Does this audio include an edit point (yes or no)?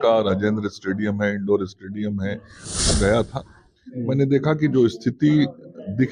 yes